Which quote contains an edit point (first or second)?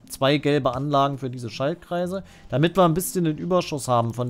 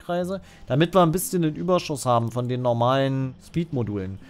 second